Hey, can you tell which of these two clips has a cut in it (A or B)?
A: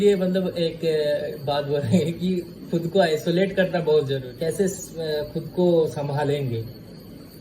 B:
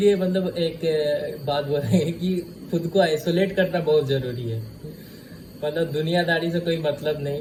A